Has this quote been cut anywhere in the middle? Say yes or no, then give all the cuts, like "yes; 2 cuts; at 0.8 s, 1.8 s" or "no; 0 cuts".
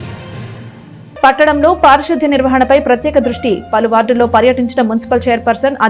yes; 1 cut; at 1.2 s